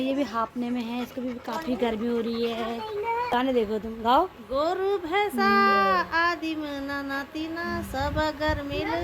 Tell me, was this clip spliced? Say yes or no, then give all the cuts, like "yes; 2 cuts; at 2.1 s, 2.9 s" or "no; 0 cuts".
yes; 1 cut; at 3.3 s